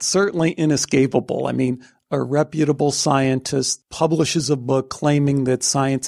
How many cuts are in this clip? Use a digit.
1